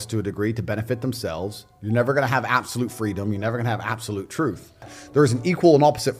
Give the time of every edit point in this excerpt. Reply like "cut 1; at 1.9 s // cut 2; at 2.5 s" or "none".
cut 1; at 5.0 s